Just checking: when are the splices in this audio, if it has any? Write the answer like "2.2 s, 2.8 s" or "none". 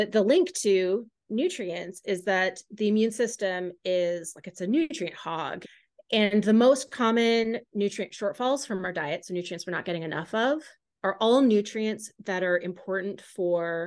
5.6 s

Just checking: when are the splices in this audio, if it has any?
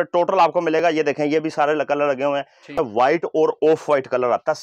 2.8 s

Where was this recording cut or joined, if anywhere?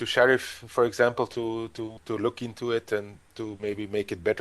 2.0 s

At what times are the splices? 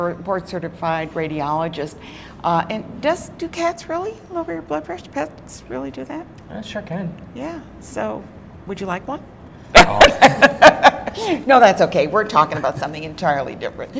none

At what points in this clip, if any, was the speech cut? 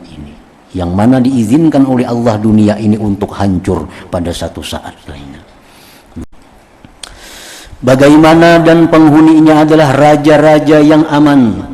6.3 s

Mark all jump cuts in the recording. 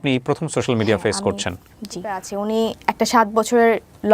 2.3 s

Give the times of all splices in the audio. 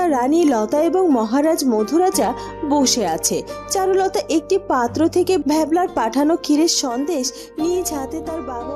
none

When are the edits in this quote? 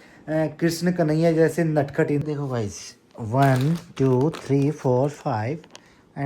2.2 s

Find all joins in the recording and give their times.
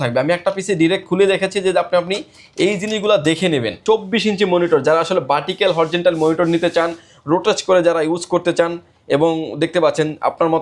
3.8 s

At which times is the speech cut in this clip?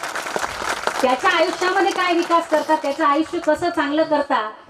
none

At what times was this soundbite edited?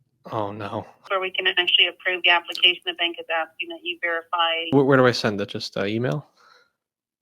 1.1 s, 4.7 s

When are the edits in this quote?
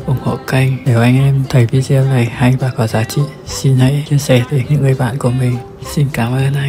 5.8 s

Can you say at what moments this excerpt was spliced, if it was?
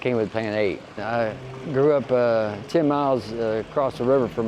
1.0 s

